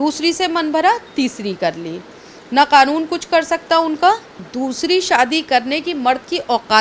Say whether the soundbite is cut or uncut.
cut